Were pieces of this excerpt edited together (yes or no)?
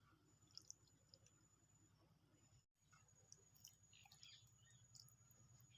no